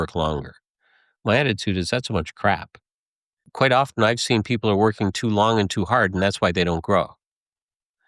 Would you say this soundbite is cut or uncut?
cut